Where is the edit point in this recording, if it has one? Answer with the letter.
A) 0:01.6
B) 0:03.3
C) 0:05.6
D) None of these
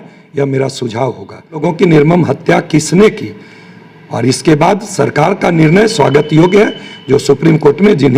A